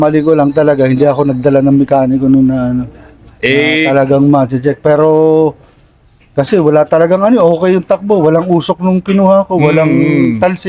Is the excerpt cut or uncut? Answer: uncut